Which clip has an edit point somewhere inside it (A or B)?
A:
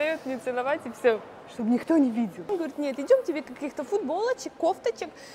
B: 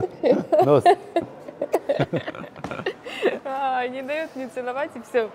A